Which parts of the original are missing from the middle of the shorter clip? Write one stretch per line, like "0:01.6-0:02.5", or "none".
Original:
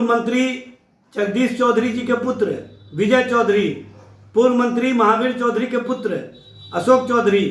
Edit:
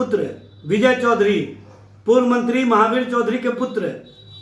none